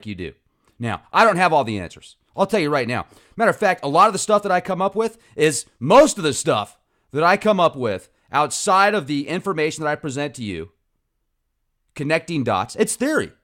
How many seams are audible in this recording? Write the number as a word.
one